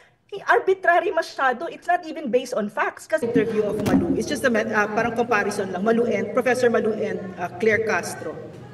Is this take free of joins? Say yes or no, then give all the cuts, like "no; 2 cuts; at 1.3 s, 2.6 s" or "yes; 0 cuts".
no; 1 cut; at 3.2 s